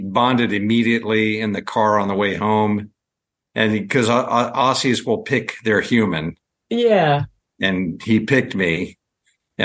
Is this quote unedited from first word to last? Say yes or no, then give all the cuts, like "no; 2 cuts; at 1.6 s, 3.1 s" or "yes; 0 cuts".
yes; 0 cuts